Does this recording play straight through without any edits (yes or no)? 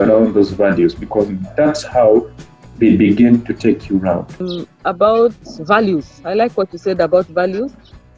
no